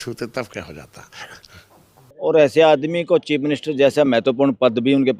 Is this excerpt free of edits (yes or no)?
no